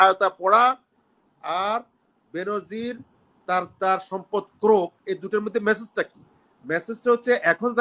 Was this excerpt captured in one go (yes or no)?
yes